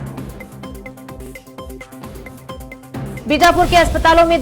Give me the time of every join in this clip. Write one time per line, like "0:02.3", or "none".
0:01.7
0:03.2